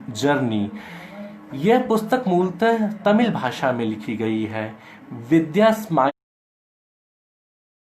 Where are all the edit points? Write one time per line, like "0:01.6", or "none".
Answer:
none